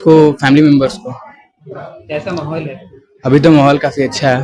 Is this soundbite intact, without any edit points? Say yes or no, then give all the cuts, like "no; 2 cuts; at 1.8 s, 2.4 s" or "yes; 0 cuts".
yes; 0 cuts